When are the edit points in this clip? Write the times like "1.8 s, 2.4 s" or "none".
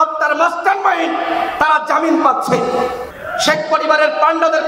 3.0 s